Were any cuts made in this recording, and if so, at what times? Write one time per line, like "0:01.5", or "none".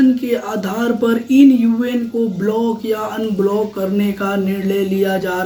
none